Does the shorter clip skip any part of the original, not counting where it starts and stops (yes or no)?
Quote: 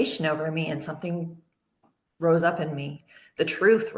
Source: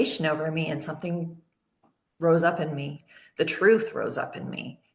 no